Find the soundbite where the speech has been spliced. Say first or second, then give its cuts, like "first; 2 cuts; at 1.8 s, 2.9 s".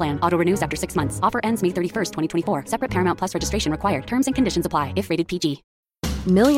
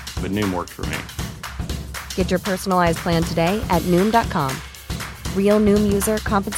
first; 1 cut; at 5.7 s